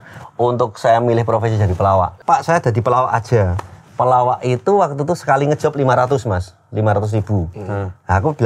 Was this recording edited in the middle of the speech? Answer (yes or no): yes